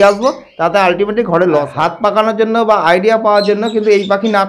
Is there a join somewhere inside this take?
yes; 1 cut; at 1.7 s

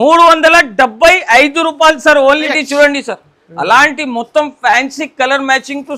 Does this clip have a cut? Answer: yes; 1 cut; at 2.5 s

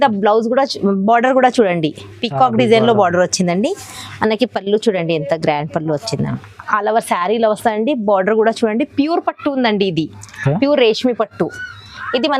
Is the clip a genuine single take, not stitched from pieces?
no; 1 cut; at 6.5 s

